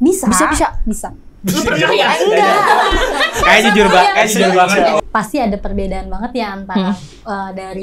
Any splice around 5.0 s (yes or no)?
yes